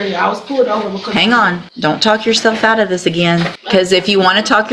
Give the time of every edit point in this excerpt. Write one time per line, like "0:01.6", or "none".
0:01.7
0:03.6